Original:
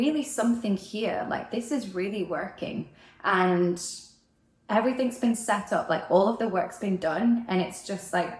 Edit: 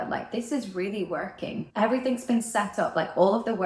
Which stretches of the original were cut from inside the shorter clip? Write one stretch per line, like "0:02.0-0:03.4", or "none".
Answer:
0:02.8-0:04.6